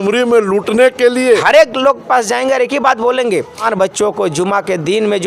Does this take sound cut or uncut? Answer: cut